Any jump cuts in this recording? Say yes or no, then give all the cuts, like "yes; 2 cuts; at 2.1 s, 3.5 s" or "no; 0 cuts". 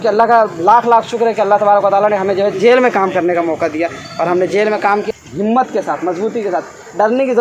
yes; 1 cut; at 5.1 s